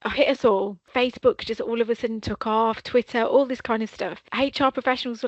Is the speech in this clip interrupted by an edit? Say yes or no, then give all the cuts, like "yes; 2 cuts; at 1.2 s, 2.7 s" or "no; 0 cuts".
yes; 2 cuts; at 0.9 s, 4.3 s